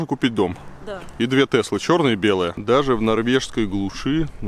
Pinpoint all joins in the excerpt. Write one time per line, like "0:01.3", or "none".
0:02.6